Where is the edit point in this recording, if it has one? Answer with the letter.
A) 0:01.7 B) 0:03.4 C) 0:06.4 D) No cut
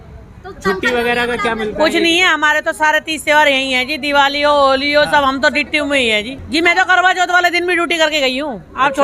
C